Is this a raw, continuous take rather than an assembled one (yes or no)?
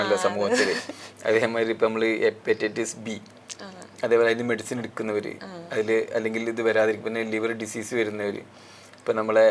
yes